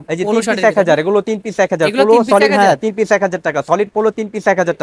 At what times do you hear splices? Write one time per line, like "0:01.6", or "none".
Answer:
none